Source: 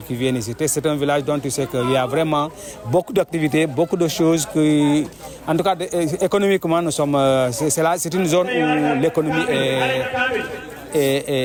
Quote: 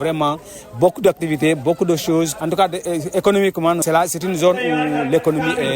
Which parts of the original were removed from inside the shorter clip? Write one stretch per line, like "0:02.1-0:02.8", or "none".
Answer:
0:04.5-0:05.4
0:06.9-0:07.7